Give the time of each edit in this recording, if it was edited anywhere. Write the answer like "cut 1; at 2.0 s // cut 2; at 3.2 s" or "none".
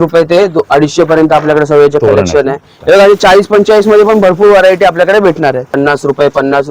cut 1; at 2.7 s // cut 2; at 5.7 s